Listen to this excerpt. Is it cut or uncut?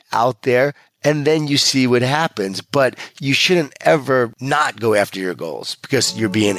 cut